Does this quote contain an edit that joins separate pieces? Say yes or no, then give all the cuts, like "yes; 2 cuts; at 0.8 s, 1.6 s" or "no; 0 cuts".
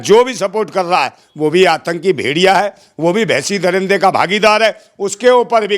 no; 0 cuts